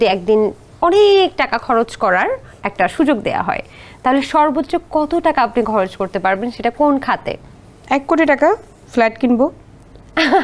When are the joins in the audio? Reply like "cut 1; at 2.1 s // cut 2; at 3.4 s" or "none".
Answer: none